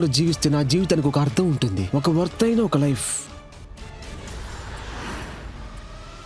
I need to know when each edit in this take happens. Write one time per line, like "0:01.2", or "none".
0:03.0